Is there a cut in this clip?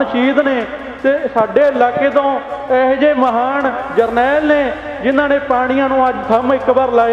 no; 0 cuts

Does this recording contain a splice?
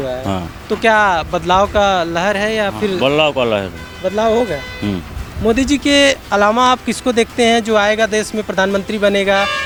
no; 0 cuts

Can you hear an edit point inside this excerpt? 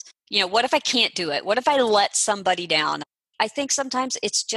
yes; 1 cut; at 3.2 s

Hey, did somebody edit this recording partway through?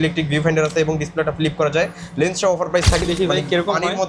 yes; 1 cut; at 3.0 s

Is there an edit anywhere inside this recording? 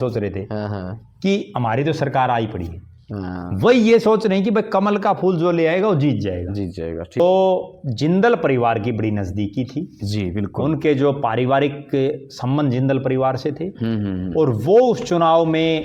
yes; 1 cut; at 7.2 s

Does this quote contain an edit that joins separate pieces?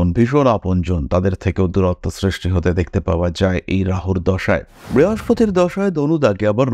yes; 1 cut; at 4.8 s

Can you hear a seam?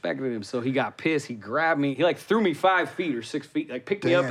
yes; 1 cut; at 1.9 s

